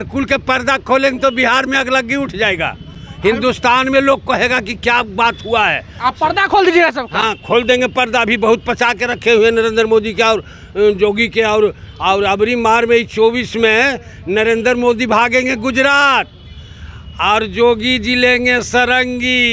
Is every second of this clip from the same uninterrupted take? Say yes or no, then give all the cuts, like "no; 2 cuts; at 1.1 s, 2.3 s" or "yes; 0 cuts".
yes; 0 cuts